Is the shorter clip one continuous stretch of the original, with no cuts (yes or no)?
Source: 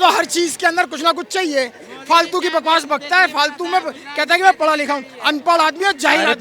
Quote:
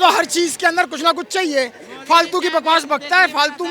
yes